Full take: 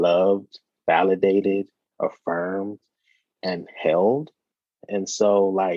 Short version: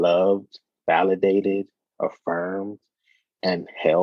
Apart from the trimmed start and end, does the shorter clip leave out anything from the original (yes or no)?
no